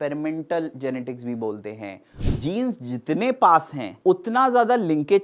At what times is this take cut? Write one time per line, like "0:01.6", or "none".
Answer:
0:02.2
0:03.8